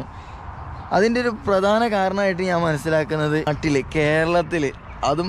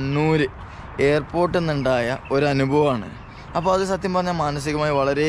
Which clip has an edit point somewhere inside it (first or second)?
first